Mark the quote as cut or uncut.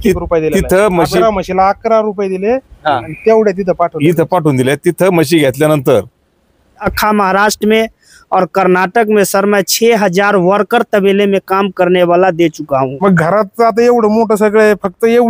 cut